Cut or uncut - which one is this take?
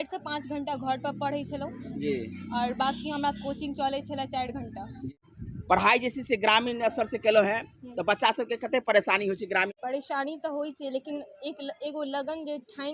cut